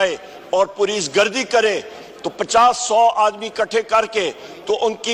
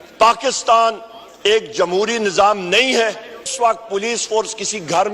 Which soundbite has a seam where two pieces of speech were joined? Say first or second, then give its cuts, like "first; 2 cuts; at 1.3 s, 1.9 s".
second; 1 cut; at 3.5 s